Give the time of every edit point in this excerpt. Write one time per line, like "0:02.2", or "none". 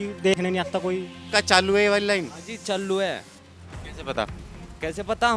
0:01.2